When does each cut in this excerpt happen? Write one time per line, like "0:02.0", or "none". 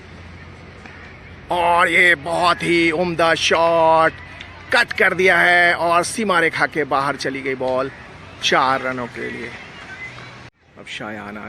0:10.5